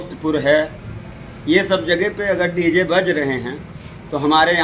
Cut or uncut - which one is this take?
uncut